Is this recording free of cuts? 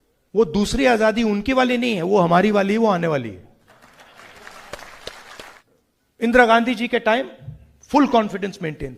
no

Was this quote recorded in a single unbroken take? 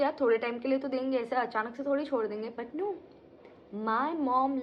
yes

